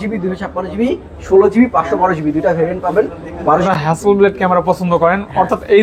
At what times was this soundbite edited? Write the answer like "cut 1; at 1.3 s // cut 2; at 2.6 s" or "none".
cut 1; at 3.7 s